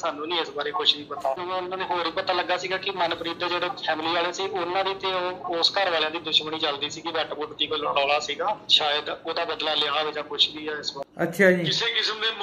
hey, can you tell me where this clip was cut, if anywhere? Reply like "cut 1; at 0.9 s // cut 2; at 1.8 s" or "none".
cut 1; at 1.4 s // cut 2; at 11.0 s